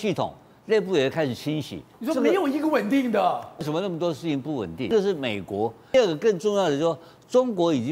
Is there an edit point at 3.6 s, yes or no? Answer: yes